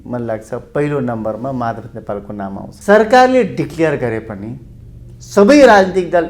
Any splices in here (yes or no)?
yes